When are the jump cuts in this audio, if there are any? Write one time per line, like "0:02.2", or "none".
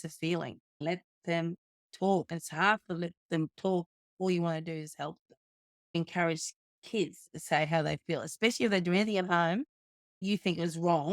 0:00.8
0:02.3
0:06.0
0:10.2